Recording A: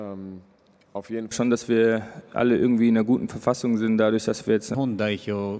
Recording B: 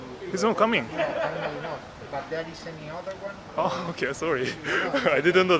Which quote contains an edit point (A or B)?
A